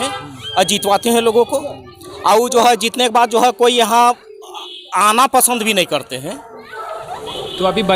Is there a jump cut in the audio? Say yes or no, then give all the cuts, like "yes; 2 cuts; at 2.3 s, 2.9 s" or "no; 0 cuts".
no; 0 cuts